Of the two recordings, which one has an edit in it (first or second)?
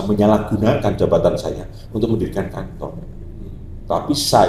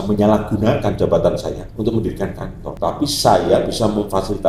second